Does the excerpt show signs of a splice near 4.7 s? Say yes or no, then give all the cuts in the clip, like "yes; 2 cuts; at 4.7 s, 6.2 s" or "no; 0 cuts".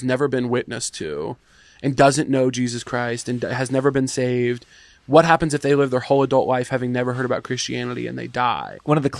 no; 1 cut; at 1.5 s